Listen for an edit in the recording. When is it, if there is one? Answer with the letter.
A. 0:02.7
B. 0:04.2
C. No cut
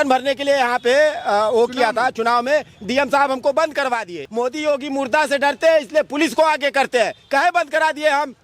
B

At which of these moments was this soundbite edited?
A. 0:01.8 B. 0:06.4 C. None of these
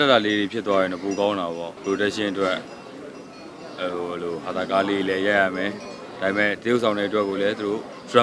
A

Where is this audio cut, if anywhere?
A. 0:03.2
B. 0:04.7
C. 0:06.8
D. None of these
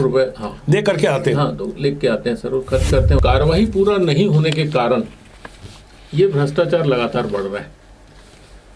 A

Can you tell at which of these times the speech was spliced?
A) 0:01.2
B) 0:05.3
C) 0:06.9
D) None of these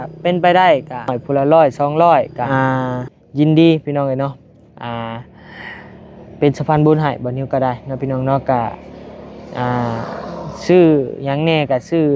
A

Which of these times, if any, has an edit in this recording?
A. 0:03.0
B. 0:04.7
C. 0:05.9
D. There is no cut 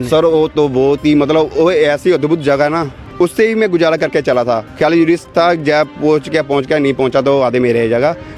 A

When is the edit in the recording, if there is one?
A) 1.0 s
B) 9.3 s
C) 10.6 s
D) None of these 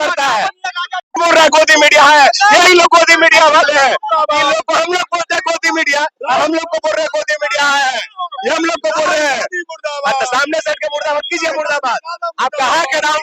A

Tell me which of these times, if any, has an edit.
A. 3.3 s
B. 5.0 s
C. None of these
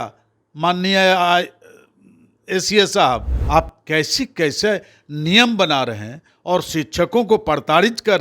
A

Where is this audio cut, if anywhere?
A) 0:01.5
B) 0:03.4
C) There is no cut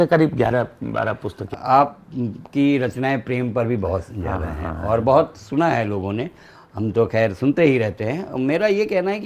A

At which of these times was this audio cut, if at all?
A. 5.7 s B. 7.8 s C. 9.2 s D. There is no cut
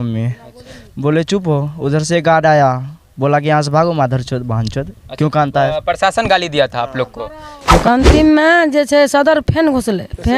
B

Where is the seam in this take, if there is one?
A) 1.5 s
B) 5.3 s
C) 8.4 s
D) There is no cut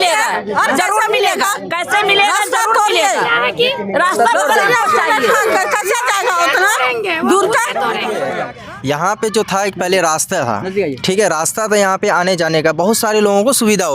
C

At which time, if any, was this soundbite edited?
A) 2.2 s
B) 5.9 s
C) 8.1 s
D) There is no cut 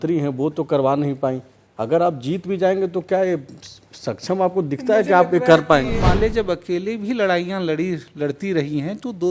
B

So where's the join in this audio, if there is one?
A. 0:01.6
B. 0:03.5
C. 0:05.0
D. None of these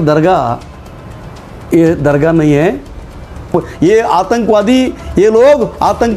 B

